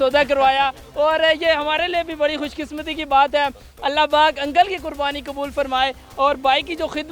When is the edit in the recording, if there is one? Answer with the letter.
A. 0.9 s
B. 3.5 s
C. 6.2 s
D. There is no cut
D